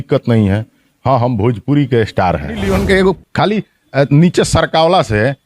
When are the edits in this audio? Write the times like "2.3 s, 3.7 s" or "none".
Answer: 2.6 s